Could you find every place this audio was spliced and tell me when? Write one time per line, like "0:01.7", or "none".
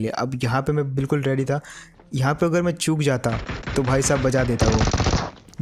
none